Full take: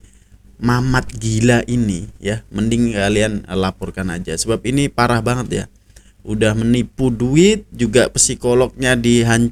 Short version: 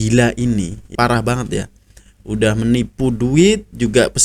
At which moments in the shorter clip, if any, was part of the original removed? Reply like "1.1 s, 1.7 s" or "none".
0.9 s